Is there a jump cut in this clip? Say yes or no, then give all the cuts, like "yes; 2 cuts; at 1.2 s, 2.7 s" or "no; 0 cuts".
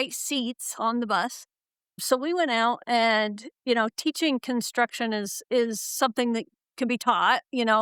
no; 0 cuts